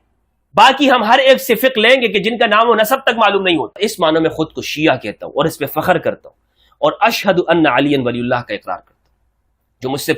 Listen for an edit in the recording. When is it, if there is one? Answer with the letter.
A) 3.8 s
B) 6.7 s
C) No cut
A